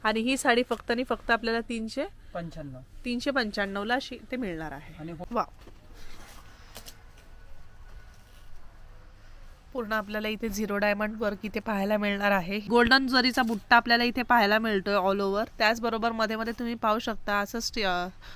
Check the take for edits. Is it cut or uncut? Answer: cut